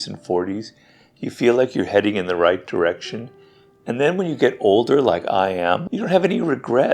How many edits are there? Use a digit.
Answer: 1